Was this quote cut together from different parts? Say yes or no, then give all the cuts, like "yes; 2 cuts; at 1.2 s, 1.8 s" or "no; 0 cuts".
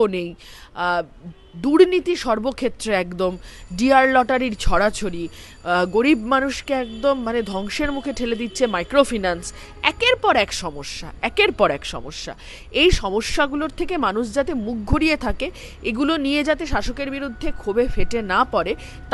no; 0 cuts